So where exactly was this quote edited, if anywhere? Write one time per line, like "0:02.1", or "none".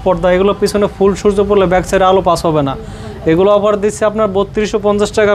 none